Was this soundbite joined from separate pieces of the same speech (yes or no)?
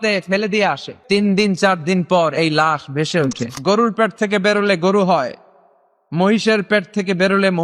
yes